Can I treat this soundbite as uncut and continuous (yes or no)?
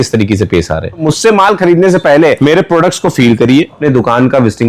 no